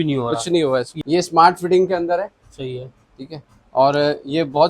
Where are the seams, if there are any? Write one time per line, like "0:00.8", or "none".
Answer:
0:00.9